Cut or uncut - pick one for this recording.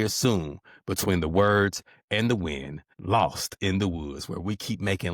uncut